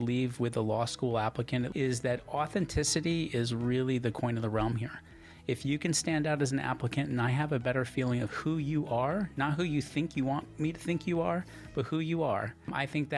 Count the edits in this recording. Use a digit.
1